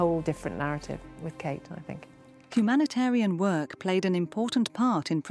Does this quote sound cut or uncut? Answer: uncut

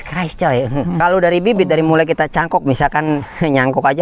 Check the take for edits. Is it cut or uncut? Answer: cut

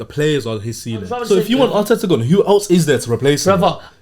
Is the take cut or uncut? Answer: cut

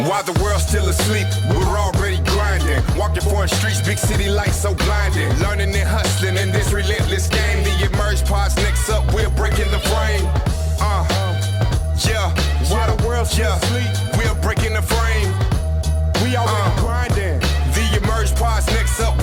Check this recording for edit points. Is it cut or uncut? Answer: uncut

